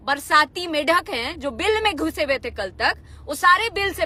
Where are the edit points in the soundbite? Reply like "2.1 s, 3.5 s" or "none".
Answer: none